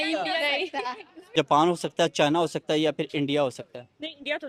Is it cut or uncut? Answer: cut